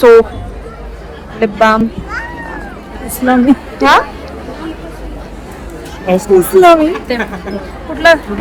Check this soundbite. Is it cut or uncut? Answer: uncut